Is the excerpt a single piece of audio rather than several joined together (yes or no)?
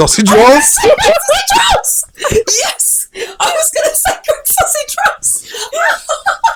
yes